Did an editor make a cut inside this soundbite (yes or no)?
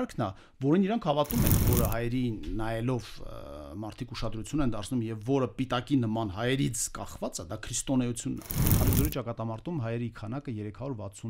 yes